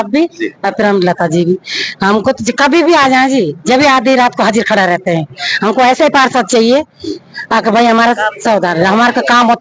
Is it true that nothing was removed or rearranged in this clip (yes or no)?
yes